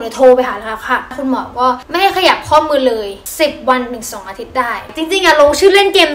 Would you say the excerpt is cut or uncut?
cut